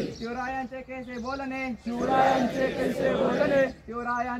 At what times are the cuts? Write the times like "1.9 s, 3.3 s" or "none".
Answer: none